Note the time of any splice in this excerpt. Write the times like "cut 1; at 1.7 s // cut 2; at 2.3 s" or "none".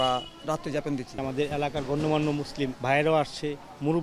cut 1; at 1.1 s // cut 2; at 2.8 s